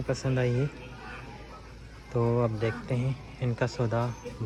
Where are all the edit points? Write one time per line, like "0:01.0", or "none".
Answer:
none